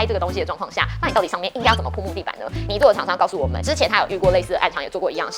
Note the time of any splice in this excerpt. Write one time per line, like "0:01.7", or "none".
0:02.7